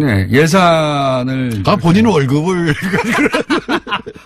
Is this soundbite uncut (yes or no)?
no